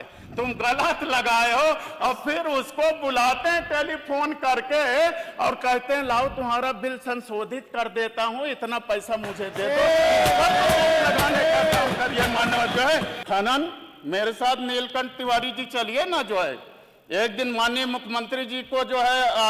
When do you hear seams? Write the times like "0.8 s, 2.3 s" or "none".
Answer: 13.1 s

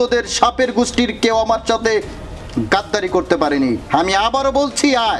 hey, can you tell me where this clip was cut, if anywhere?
3.8 s

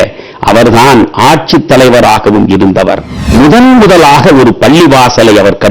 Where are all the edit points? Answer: 3.1 s

